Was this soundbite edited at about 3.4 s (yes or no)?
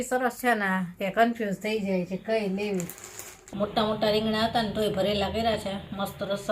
yes